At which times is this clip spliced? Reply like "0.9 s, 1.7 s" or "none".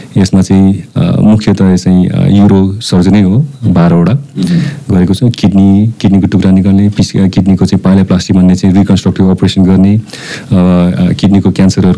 none